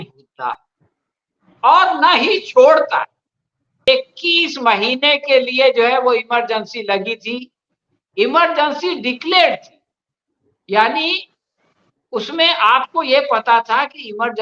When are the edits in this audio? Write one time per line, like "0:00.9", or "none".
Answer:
0:03.7